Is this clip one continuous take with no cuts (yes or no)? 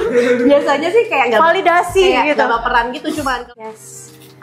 no